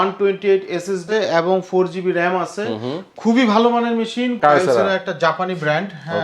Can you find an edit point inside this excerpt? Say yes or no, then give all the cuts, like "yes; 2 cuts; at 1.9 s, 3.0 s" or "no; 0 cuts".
yes; 2 cuts; at 1.0 s, 4.4 s